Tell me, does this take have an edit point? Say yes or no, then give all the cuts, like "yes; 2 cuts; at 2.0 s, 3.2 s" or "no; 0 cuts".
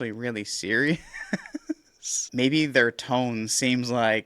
yes; 1 cut; at 2.3 s